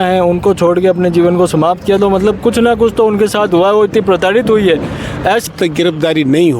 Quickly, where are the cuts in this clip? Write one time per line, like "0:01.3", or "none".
0:05.5